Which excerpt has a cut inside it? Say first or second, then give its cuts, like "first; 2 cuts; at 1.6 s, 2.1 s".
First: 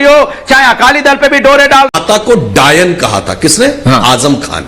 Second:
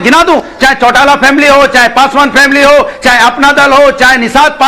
first; 1 cut; at 1.9 s